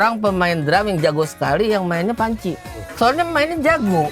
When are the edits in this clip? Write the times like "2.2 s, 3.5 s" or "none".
2.8 s

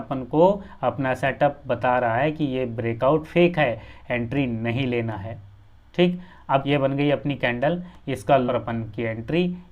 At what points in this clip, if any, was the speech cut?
6.6 s, 8.5 s

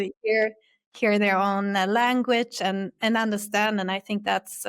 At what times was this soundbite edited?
none

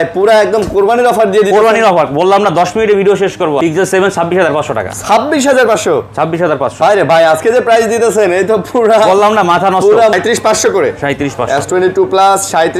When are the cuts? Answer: 3.6 s, 10.1 s

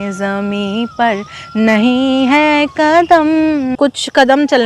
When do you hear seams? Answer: 3.7 s

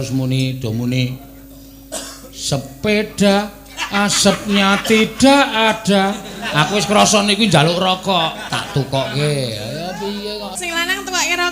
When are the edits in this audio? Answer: 8.4 s, 10.6 s

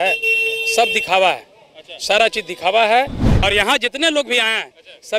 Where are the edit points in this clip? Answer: 3.2 s

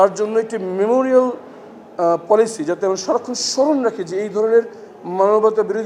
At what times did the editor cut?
none

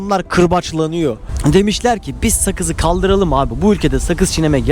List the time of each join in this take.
1.3 s

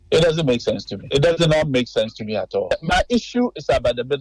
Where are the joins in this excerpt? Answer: 0.9 s

